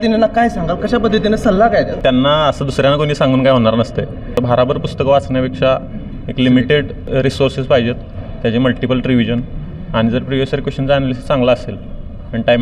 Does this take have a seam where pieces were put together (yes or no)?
yes